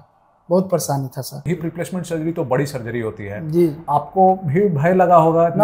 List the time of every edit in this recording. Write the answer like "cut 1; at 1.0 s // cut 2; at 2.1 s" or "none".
cut 1; at 1.4 s // cut 2; at 3.8 s